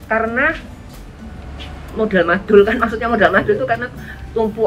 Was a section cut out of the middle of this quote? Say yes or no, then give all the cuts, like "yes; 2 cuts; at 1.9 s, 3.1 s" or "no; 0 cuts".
no; 0 cuts